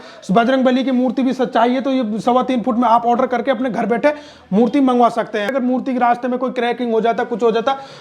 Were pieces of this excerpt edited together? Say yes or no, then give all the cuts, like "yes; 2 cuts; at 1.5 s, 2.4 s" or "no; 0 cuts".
yes; 1 cut; at 5.5 s